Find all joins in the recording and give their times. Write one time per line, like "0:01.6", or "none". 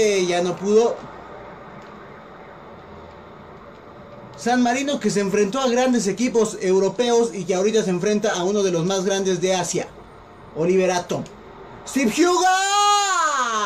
0:01.0